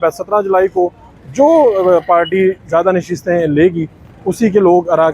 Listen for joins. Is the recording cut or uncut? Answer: uncut